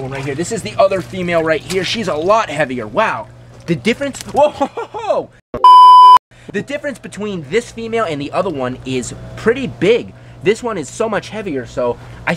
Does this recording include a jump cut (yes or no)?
no